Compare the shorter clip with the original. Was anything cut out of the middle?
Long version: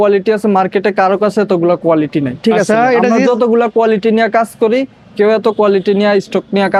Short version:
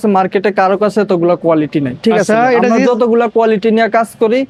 no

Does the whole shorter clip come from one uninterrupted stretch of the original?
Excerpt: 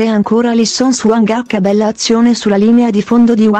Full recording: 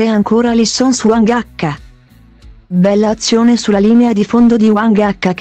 no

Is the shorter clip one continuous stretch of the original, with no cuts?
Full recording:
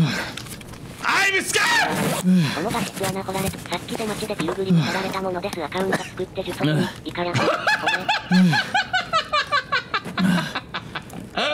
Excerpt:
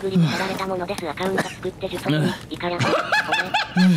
yes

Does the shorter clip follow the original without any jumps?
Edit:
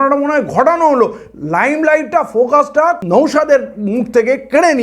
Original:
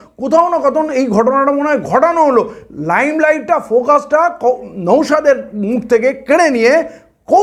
no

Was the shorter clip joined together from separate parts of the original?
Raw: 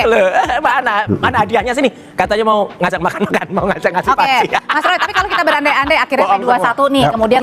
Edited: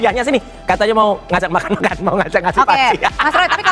no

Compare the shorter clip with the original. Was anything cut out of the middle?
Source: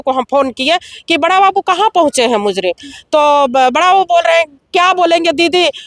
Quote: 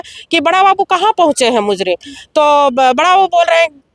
no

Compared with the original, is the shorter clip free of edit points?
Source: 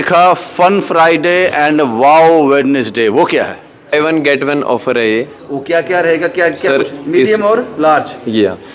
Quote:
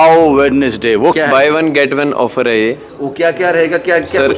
no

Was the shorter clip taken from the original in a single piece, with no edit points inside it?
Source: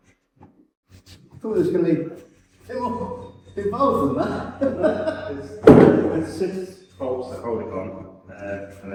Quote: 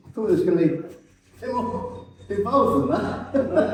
yes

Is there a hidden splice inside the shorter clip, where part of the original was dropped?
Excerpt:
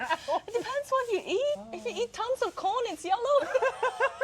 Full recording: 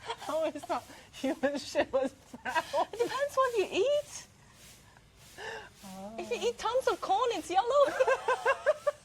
yes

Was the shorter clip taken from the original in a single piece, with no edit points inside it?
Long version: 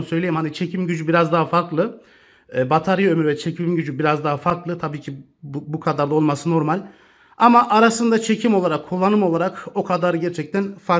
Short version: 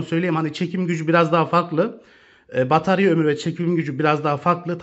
yes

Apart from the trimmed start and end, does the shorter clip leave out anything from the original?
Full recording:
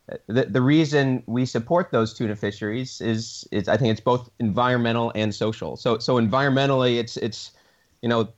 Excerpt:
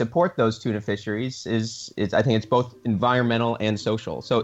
no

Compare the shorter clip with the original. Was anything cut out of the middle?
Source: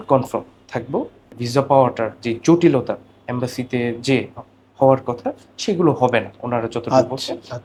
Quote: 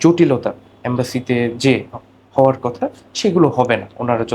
no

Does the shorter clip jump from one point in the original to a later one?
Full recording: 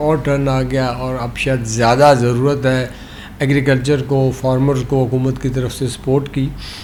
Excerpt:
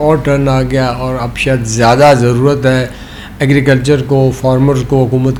no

